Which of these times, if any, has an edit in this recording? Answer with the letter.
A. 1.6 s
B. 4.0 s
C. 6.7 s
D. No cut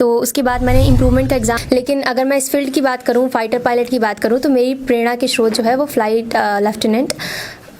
A